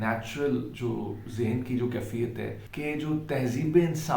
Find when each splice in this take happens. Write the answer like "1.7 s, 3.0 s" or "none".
2.6 s